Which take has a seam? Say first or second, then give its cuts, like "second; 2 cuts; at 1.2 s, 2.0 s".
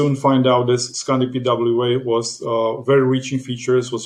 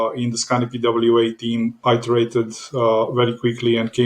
second; 1 cut; at 1.8 s